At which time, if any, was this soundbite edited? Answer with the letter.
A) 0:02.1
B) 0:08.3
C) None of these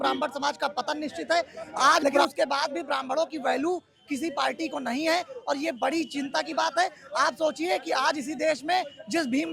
A